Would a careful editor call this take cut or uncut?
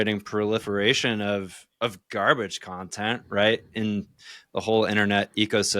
uncut